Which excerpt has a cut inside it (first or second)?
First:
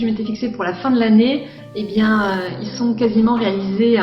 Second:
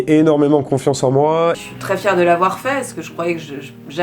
second